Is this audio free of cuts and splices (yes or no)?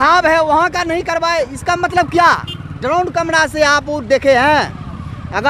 yes